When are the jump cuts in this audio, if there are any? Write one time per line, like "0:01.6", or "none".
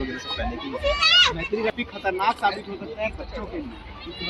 0:01.7